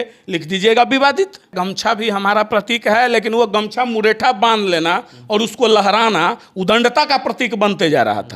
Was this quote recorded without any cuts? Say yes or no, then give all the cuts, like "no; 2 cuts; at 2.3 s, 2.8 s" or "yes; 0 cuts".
no; 1 cut; at 1.6 s